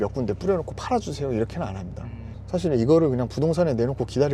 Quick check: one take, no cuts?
yes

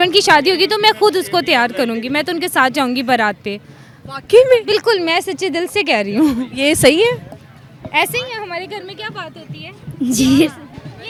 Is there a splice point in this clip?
no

